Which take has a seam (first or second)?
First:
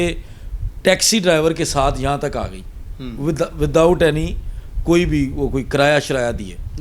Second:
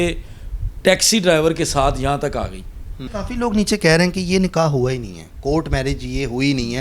second